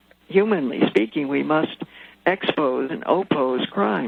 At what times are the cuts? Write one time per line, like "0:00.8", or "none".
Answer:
none